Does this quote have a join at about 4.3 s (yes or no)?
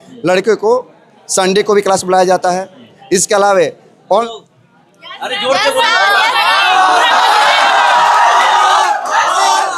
yes